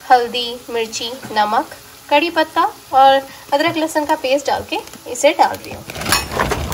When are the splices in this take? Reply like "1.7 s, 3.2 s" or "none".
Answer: none